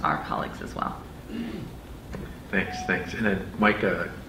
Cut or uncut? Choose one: uncut